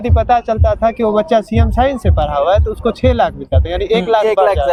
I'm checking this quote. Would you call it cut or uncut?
uncut